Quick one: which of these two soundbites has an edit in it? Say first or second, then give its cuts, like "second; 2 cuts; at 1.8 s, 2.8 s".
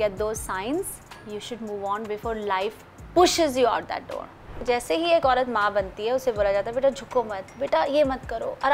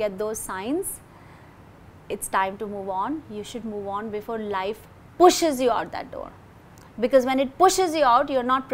first; 2 cuts; at 1.3 s, 4.5 s